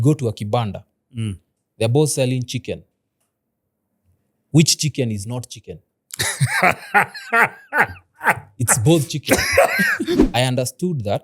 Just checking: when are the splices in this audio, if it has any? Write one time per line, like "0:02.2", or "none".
0:10.2